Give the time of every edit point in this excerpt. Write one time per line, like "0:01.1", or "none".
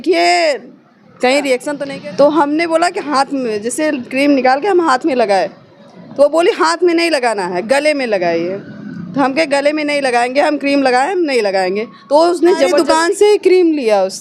0:01.8
0:12.7